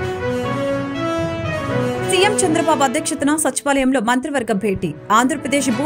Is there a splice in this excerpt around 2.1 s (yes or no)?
yes